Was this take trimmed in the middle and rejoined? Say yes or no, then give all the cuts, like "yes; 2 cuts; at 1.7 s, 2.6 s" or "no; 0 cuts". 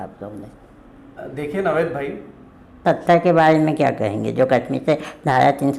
yes; 1 cut; at 2.8 s